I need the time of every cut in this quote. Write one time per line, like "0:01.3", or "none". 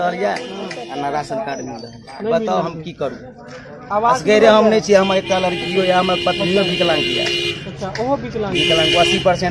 none